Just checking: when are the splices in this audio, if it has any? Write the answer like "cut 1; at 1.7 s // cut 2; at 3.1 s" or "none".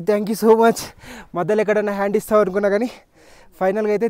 none

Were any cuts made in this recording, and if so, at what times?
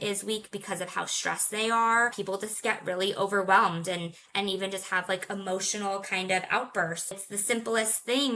cut 1; at 2.2 s // cut 2; at 7.2 s

